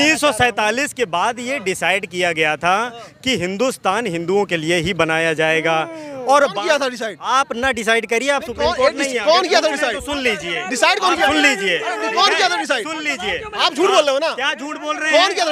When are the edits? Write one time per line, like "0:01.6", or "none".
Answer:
none